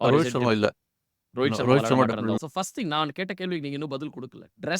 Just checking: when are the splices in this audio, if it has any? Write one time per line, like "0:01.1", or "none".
0:02.4

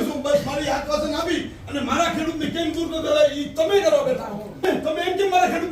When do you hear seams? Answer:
0:04.7

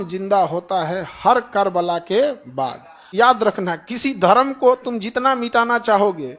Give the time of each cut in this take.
0:03.0

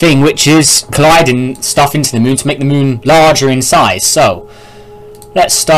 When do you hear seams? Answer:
0:03.2

